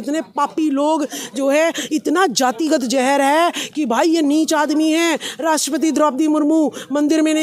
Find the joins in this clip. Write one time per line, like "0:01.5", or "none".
none